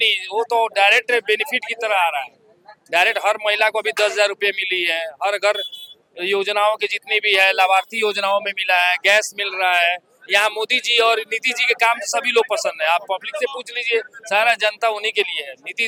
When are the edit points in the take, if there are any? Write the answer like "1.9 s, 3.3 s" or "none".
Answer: none